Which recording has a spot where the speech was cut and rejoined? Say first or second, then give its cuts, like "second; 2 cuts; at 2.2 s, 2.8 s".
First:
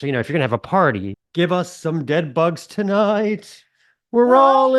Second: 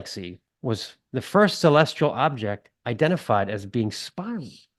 first; 1 cut; at 1.1 s